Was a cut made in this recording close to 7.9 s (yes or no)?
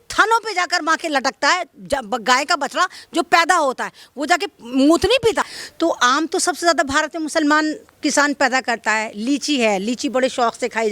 no